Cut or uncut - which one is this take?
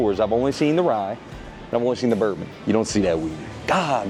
uncut